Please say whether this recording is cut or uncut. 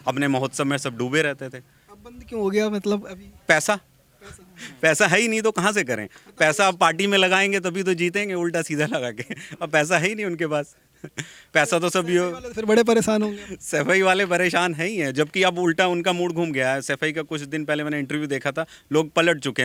uncut